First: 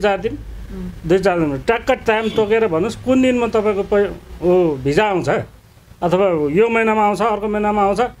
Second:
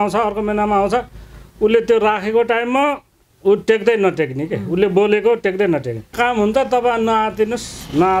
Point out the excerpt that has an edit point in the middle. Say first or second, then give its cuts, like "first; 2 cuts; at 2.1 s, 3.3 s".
second; 1 cut; at 6.1 s